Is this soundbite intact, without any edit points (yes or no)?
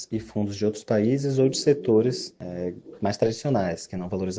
yes